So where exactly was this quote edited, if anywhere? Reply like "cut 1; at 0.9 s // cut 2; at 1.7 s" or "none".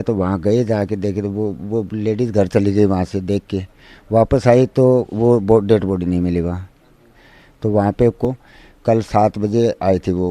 cut 1; at 8.2 s